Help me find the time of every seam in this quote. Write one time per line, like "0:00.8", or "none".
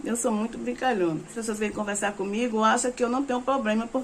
0:01.4